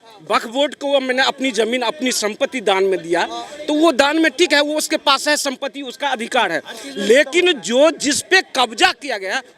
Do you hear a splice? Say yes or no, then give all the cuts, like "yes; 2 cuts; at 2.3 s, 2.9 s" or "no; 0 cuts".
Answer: no; 0 cuts